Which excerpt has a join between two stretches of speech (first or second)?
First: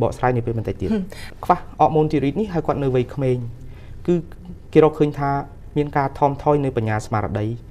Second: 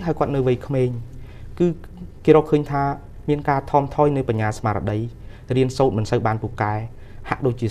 first